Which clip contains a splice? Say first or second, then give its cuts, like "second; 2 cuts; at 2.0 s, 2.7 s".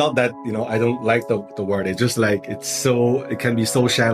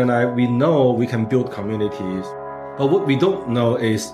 second; 1 cut; at 2.4 s